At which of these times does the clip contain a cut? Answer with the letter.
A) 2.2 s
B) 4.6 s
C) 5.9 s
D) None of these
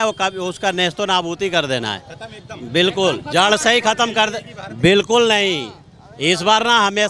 D